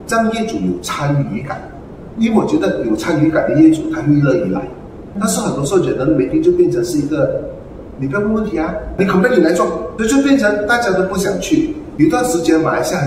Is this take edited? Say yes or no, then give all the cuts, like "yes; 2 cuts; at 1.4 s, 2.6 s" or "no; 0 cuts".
yes; 1 cut; at 11.8 s